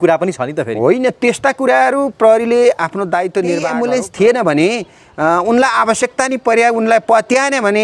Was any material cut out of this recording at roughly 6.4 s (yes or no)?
no